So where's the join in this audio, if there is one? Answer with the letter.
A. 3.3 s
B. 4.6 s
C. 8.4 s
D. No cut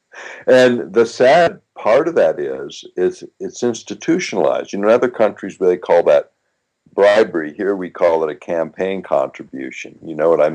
B